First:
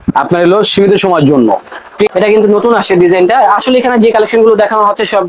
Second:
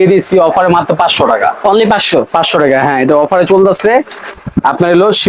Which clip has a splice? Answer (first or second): first